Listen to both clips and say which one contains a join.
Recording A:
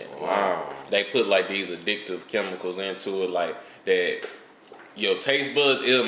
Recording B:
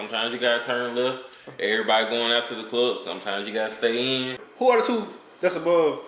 B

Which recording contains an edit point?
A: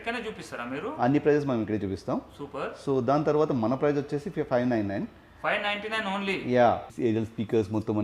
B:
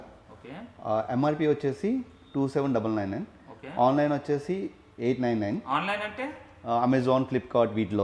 A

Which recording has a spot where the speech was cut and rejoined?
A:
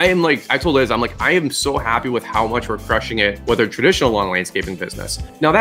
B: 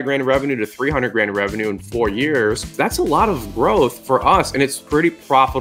B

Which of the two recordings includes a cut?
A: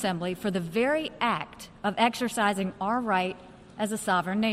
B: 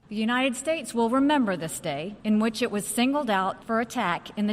B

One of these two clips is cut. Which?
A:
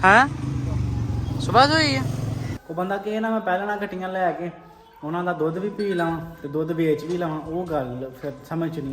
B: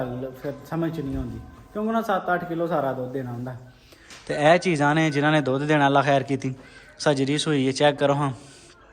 A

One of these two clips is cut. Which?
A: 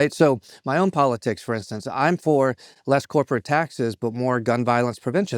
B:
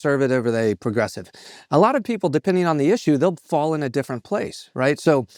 A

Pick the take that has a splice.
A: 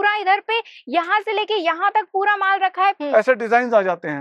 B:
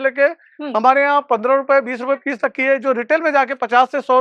A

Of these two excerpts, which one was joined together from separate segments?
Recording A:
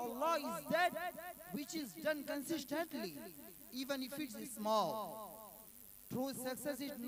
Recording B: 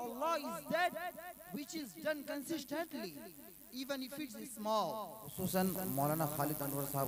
B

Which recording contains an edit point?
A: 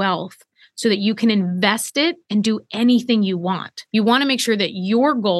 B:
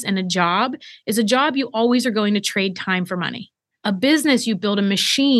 A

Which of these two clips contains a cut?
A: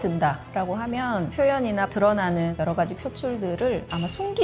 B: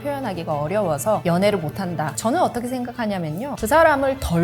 B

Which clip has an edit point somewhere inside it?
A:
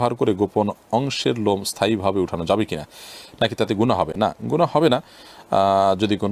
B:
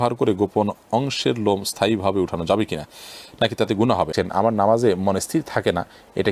B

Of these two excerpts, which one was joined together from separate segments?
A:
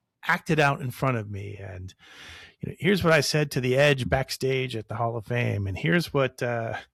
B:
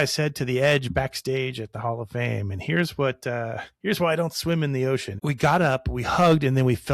B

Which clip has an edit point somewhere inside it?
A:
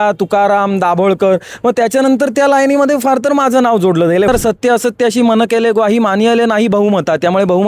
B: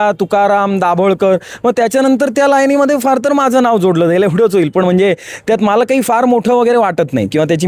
A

